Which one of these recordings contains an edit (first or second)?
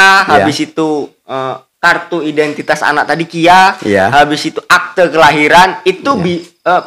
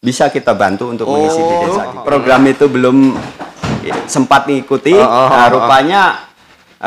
second